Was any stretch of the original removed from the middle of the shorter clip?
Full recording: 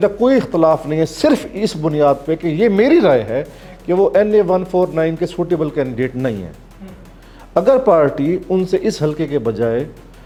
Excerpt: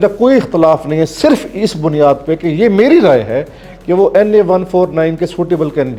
no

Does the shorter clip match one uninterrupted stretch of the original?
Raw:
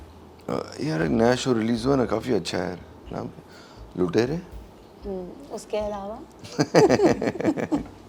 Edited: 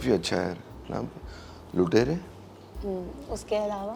yes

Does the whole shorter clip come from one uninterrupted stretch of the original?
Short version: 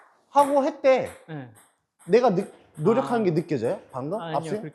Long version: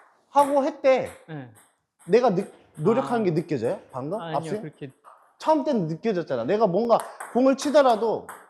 yes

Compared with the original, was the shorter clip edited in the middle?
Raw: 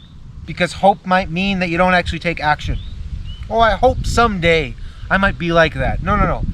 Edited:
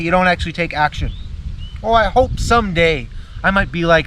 no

